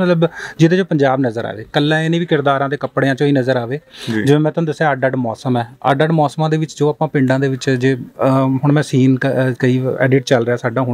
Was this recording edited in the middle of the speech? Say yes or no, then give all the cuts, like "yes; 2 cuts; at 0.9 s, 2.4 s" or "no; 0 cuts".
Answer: no; 0 cuts